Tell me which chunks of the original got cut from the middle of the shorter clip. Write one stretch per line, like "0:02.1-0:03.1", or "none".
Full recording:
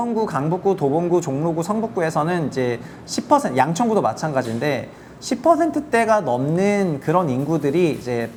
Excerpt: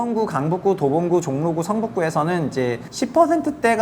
0:02.9-0:05.1